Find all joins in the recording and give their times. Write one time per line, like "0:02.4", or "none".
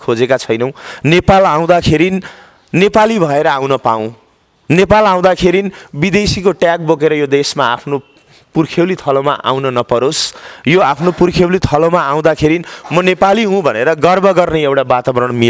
none

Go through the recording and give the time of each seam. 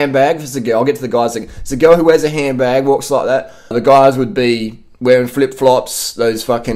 0:03.7

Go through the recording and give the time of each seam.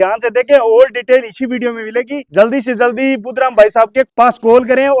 0:04.1

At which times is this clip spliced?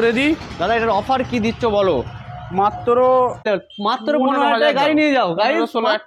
0:03.5

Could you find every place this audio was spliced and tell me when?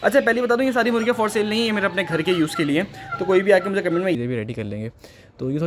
0:04.1

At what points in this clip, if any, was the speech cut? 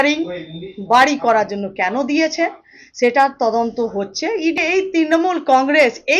0:04.6

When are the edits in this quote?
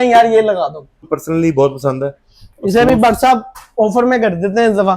0:01.1

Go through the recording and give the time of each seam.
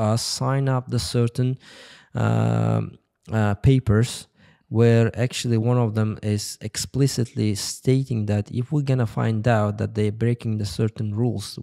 none

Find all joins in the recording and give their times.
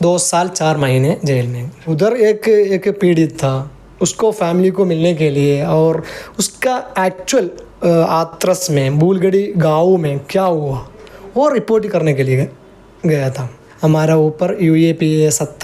0:01.9
0:13.6

